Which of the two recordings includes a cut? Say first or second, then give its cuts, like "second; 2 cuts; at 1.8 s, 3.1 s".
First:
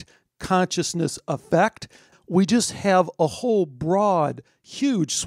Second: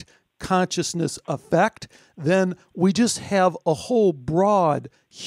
first; 1 cut; at 2.1 s